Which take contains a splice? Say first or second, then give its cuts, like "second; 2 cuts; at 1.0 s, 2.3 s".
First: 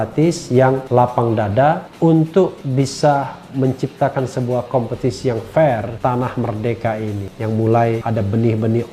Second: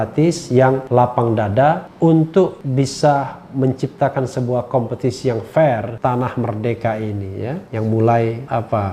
first; 2 cuts; at 7.3 s, 8.0 s